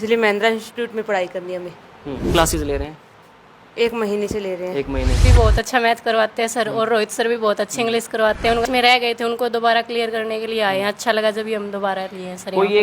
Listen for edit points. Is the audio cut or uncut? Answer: cut